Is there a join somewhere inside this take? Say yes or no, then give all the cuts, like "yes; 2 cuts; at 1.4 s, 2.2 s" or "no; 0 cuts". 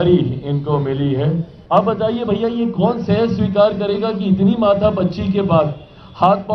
yes; 1 cut; at 1.5 s